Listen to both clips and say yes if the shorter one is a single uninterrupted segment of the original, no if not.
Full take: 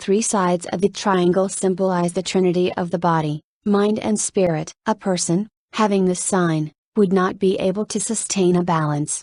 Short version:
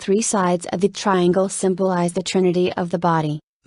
yes